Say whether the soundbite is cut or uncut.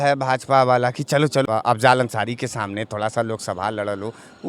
cut